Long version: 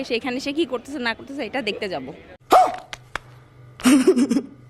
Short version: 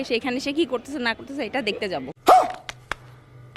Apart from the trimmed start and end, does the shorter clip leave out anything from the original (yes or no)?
yes